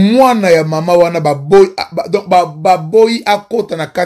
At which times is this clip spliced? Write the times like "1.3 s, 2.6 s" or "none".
none